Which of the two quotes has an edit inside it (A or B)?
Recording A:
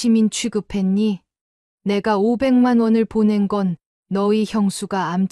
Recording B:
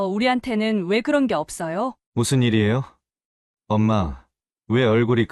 B